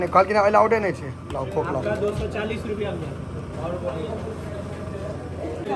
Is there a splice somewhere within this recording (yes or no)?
no